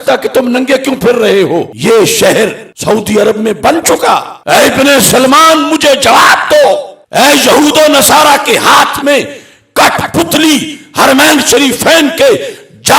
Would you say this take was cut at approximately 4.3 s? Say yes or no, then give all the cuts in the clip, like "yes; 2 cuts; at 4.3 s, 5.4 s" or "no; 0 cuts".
yes; 1 cut; at 4.3 s